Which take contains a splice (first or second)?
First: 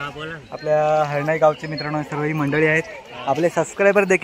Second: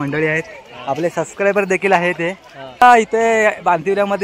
second